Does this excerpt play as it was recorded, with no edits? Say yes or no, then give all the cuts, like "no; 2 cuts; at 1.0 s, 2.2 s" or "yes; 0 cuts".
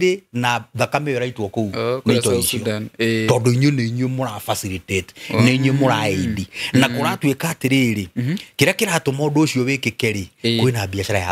yes; 0 cuts